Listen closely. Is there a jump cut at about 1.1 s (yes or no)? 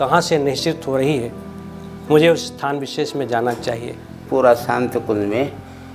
no